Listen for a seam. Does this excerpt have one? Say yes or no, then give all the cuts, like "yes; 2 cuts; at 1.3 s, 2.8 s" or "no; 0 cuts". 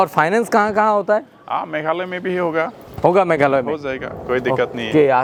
no; 0 cuts